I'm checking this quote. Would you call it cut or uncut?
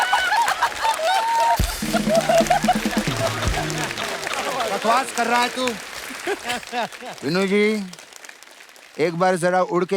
cut